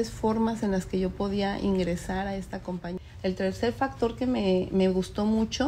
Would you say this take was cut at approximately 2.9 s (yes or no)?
yes